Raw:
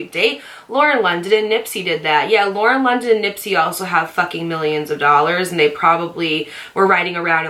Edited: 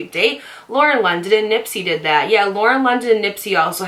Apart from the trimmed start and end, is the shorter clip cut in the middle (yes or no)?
no